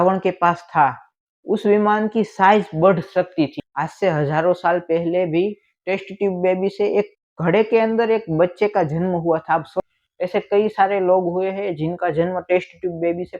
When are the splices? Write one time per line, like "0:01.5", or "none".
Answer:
0:03.6
0:09.8

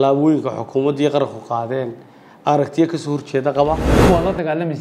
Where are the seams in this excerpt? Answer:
0:03.9

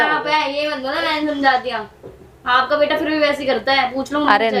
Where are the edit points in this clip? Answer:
none

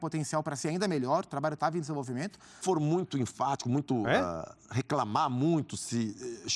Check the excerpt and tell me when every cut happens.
0:02.6

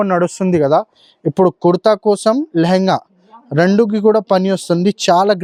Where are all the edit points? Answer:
none

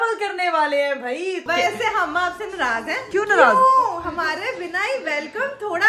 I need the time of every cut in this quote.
0:01.4
0:03.0

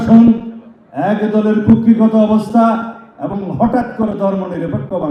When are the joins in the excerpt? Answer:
none

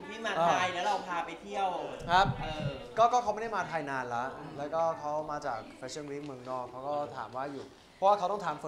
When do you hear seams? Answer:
none

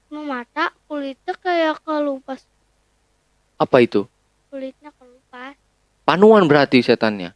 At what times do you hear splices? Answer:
none

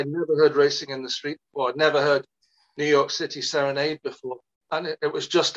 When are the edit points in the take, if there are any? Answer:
0:04.5

